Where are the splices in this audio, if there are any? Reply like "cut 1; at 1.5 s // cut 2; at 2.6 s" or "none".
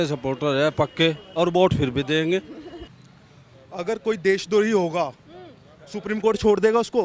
cut 1; at 2.9 s